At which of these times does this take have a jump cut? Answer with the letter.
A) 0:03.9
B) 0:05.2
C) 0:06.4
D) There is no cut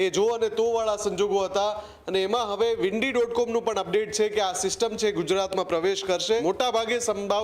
C